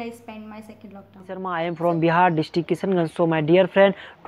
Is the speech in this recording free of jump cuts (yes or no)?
no